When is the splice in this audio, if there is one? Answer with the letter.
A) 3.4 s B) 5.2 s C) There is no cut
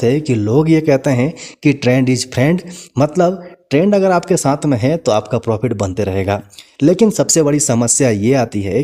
C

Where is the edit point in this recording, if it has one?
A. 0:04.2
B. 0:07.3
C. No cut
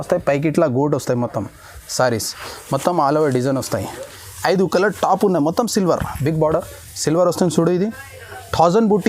A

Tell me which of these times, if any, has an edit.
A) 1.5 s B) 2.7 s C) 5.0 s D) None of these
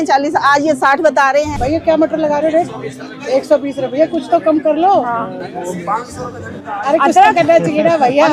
A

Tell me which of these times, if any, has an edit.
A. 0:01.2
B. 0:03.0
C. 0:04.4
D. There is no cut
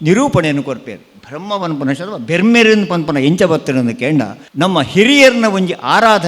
C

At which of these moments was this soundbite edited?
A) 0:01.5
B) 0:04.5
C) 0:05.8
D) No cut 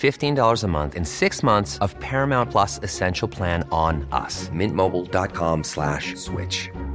D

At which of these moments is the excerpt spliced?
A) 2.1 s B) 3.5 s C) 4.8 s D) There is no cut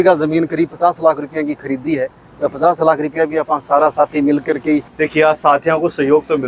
C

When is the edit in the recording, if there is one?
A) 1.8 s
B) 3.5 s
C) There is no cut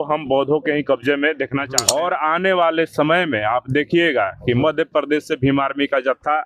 A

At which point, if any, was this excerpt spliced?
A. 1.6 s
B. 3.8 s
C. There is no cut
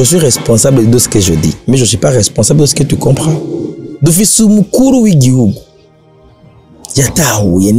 B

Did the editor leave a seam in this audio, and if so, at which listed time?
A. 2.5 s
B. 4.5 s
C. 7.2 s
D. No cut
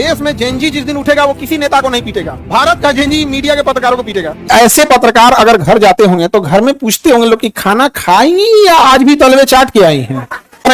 B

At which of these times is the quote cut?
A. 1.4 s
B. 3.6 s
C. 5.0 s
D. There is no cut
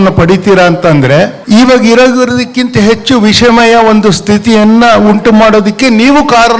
A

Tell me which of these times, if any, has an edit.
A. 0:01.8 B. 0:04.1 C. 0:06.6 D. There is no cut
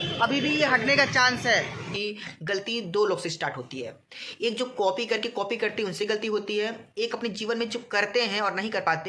A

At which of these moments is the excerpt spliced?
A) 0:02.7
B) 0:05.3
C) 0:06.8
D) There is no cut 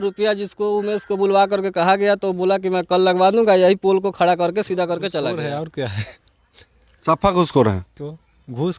B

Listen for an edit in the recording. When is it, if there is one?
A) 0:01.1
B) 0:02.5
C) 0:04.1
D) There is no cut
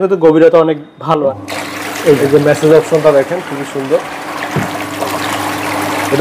A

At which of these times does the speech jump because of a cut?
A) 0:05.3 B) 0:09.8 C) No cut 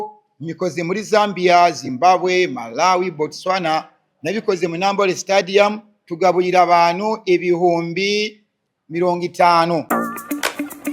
B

